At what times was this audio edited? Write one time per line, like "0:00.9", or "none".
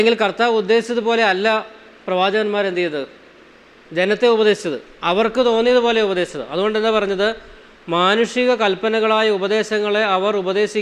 none